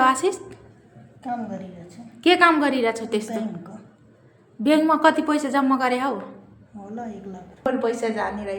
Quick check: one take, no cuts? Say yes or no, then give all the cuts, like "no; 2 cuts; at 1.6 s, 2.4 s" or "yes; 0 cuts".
no; 1 cut; at 7.7 s